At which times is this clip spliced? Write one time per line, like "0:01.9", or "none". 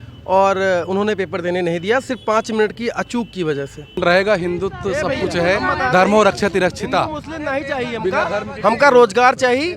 0:03.9

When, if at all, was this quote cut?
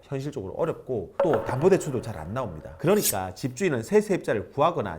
0:02.6

